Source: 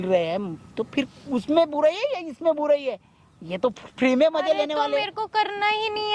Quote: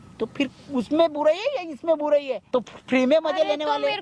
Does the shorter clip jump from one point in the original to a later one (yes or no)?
yes